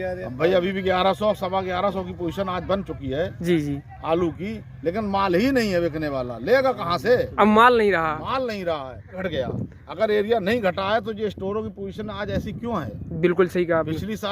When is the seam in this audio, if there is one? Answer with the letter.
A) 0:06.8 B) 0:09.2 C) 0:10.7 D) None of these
B